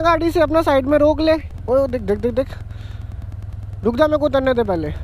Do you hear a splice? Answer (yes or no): yes